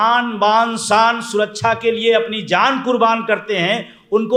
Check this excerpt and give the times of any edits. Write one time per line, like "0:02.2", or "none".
none